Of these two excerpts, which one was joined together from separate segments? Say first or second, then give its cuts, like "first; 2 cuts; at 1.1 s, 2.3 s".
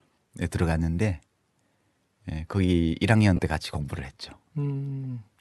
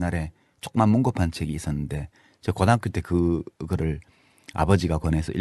first; 1 cut; at 3.4 s